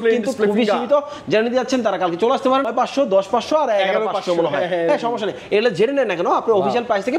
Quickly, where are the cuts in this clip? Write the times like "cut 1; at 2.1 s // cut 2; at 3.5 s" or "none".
cut 1; at 2.7 s

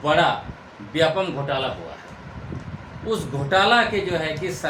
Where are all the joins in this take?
none

